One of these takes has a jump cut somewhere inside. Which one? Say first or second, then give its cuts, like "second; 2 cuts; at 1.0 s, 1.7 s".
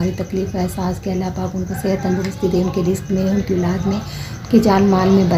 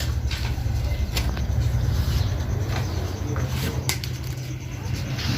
second; 1 cut; at 1.1 s